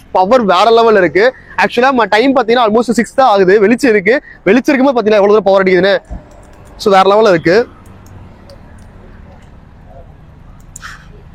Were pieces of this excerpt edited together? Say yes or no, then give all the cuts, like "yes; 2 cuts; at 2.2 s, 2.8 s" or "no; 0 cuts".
no; 0 cuts